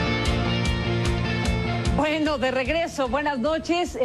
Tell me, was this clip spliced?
yes; 1 cut; at 1.0 s

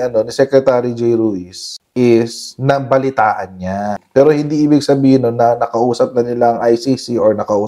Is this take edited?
no; 0 cuts

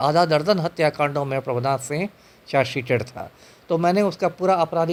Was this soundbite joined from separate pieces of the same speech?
no; 0 cuts

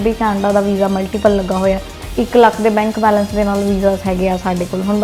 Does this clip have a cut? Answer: yes; 1 cut; at 2.0 s

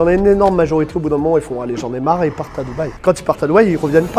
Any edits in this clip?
no; 0 cuts

